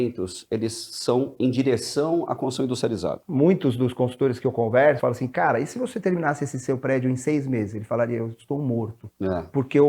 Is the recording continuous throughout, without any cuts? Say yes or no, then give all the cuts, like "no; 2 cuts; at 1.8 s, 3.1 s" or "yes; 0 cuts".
no; 2 cuts; at 3.2 s, 5.0 s